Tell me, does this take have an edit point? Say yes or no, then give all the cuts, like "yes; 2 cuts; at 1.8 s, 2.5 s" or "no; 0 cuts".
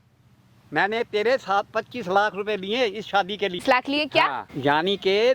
yes; 2 cuts; at 3.6 s, 4.5 s